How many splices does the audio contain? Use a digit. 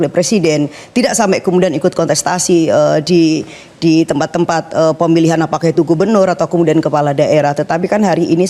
0